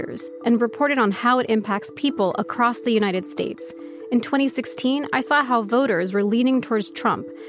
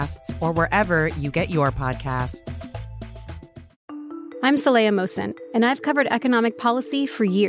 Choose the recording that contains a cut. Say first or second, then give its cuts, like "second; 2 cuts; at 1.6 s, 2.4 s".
second; 1 cut; at 3.7 s